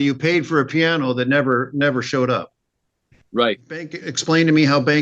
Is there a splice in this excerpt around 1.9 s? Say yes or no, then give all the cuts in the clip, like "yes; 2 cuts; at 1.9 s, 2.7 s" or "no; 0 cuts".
no; 1 cut; at 4.0 s